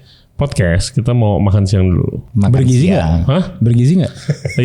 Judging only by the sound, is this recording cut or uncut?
cut